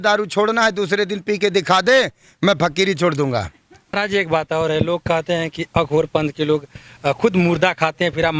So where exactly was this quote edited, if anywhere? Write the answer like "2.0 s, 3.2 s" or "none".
3.9 s